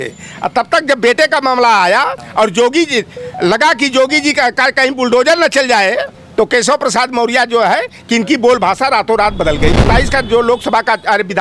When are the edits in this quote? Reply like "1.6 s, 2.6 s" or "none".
2.2 s, 6.2 s, 9.9 s